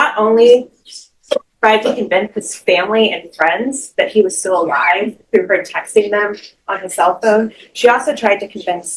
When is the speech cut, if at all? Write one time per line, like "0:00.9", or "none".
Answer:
none